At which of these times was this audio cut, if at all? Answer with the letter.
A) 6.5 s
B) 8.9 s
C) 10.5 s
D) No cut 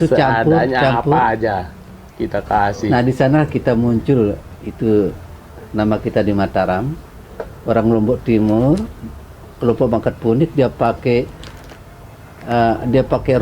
D